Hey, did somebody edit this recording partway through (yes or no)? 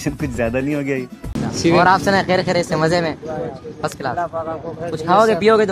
yes